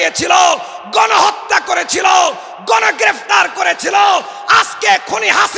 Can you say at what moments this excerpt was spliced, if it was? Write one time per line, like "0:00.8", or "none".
none